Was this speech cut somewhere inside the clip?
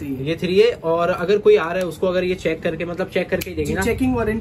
no; 0 cuts

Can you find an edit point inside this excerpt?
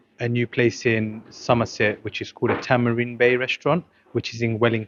no; 0 cuts

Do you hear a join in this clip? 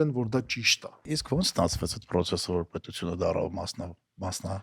yes; 1 cut; at 1.1 s

